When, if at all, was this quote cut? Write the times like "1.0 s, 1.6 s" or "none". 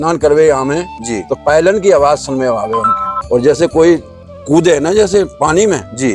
3.2 s